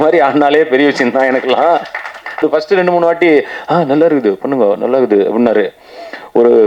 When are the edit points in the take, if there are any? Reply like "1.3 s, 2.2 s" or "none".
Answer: 2.4 s